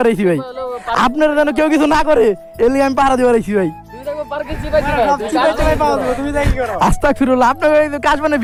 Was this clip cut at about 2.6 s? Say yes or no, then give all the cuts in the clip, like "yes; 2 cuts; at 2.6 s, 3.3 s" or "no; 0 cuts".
no; 0 cuts